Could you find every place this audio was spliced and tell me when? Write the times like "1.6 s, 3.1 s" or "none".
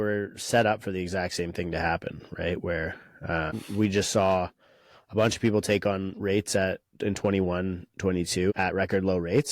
3.5 s, 8.5 s